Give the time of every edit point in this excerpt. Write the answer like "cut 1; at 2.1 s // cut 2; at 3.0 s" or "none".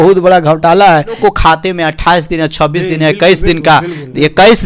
cut 1; at 1.2 s